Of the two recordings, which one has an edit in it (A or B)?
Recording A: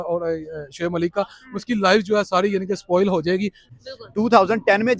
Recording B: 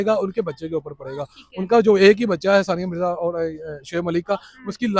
A